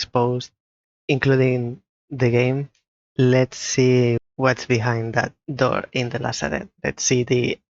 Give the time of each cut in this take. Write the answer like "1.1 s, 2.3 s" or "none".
4.2 s, 5.4 s, 6.7 s

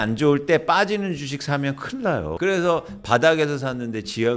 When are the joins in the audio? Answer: 2.3 s

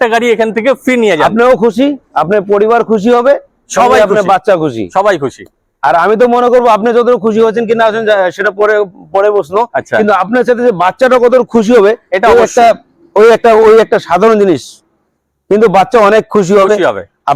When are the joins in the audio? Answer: none

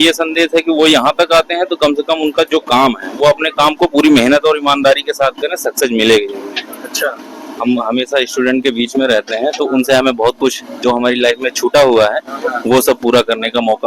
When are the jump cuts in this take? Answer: 7.5 s

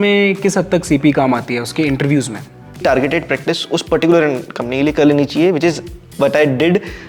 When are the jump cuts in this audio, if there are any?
2.8 s

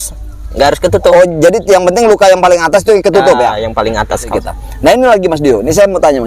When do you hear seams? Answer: 4.3 s

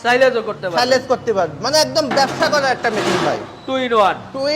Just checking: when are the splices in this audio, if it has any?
none

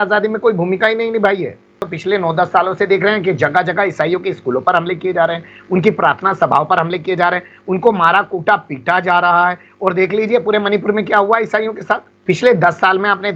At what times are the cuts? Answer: 1.9 s, 12.1 s

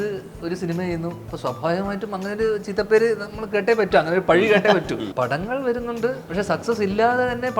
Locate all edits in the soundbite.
1.3 s, 5.1 s, 6.2 s

